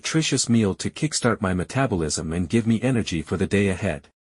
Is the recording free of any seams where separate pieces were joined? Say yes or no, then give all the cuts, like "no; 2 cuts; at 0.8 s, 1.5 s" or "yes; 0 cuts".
no; 1 cut; at 2.2 s